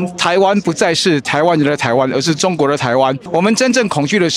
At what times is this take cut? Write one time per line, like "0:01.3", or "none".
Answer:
0:03.2